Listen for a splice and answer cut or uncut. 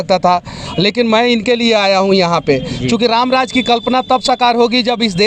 uncut